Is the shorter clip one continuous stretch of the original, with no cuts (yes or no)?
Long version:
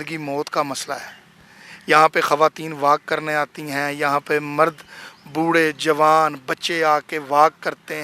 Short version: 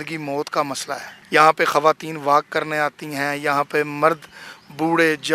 no